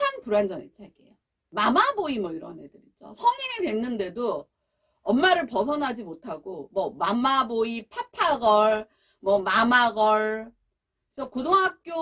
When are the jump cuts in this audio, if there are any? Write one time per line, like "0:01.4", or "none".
0:01.4